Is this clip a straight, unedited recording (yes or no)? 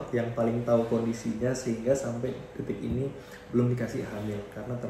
yes